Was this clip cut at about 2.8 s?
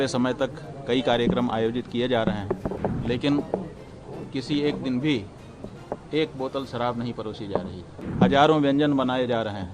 yes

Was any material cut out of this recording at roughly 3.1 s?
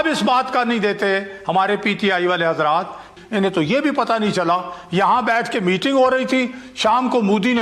yes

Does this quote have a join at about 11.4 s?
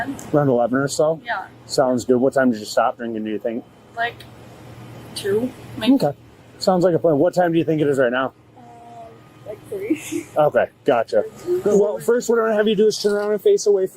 yes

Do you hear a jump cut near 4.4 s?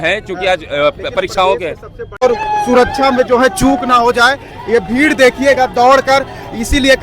no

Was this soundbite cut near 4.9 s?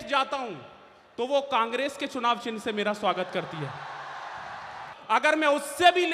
yes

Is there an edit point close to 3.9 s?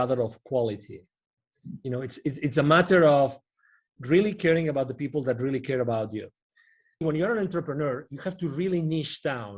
no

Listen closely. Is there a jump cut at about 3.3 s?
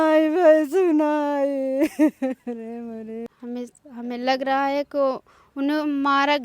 yes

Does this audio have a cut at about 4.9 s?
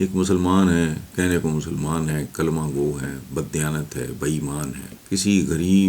yes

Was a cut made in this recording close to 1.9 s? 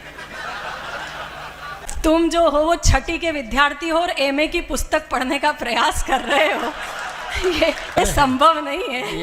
yes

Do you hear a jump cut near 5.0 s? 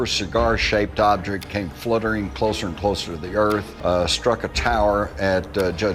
no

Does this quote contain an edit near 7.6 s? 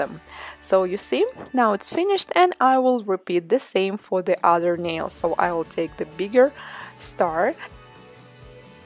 yes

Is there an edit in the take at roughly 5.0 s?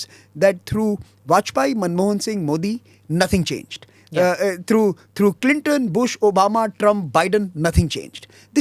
no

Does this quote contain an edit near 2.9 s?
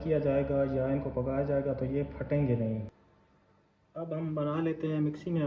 yes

